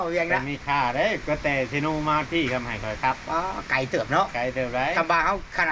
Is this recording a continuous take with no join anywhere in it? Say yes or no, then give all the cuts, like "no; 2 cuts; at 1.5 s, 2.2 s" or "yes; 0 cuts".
yes; 0 cuts